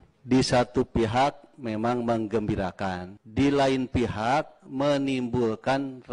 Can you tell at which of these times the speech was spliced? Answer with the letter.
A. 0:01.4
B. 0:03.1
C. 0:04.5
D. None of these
B